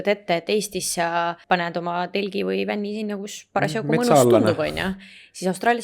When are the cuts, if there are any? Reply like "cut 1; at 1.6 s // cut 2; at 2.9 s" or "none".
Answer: cut 1; at 1.4 s